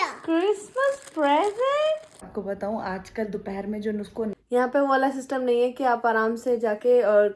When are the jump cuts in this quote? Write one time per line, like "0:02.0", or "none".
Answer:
0:02.2
0:04.3